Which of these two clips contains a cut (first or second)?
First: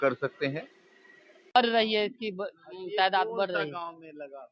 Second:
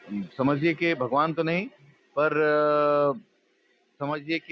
first